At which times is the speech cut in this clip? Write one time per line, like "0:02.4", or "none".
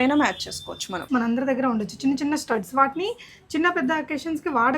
0:01.1

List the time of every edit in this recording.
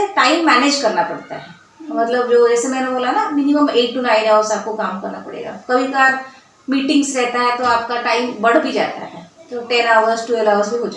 none

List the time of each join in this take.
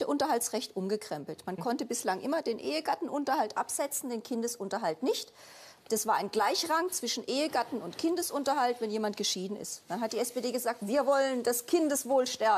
0:10.8

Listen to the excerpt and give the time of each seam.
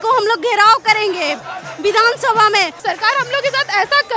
0:02.8

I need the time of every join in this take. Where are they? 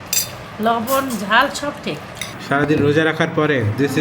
0:02.3

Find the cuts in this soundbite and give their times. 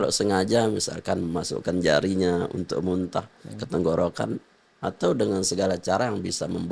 none

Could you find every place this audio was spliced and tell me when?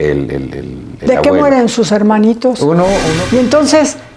0:03.2

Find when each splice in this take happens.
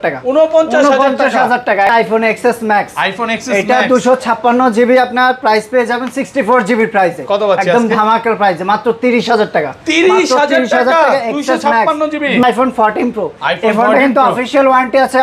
0:02.0
0:12.4

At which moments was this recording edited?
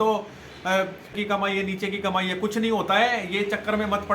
0:01.1

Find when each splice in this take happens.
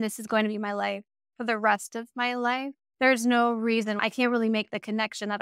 0:02.8
0:04.0

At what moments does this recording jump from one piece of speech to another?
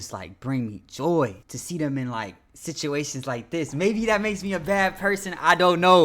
0:01.5

